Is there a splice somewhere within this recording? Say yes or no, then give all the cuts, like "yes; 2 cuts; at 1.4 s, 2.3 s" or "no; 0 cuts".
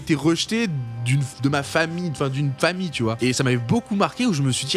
no; 0 cuts